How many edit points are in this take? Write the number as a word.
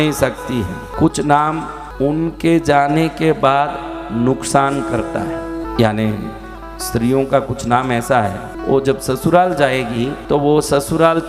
five